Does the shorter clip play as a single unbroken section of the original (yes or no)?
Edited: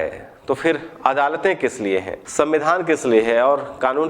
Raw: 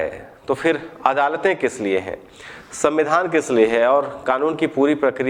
no